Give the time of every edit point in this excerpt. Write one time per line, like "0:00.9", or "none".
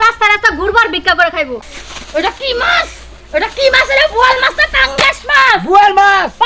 0:01.6